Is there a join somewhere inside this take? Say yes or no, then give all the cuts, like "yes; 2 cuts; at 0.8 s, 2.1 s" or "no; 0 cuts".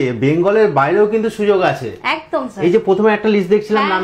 no; 0 cuts